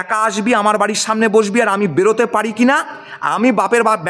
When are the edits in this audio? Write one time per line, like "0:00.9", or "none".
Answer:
none